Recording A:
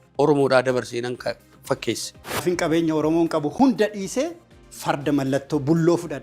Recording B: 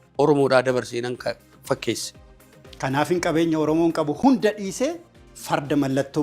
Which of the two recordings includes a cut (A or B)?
A